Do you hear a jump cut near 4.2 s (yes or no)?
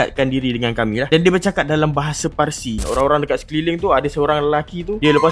no